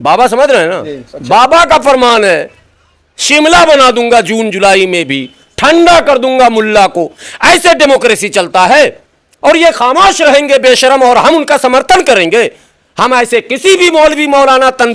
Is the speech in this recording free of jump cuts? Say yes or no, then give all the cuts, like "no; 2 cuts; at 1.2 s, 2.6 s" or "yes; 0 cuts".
yes; 0 cuts